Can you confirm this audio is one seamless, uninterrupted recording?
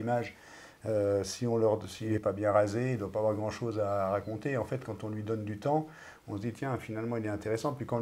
no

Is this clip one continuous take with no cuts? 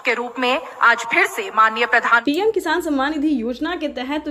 no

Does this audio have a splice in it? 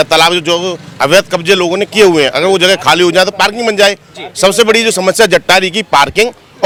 no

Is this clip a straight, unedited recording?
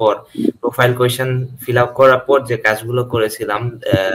yes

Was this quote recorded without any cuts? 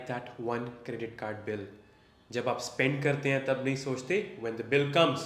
yes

